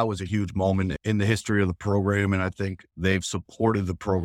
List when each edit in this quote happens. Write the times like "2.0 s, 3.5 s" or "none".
1.0 s